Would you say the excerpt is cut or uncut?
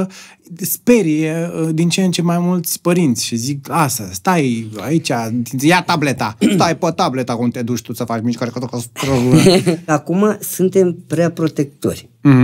cut